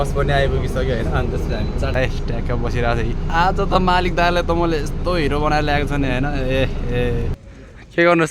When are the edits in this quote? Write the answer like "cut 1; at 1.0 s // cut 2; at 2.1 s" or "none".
cut 1; at 1.9 s // cut 2; at 7.4 s